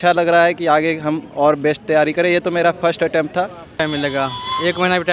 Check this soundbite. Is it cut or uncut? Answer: cut